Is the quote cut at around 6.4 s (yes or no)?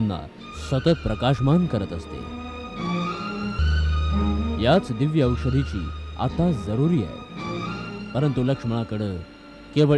no